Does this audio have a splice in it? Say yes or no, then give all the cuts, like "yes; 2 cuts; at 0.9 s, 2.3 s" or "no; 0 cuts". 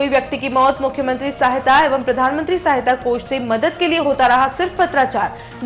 no; 0 cuts